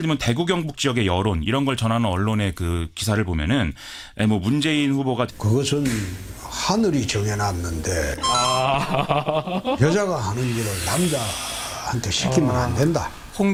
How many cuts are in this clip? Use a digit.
0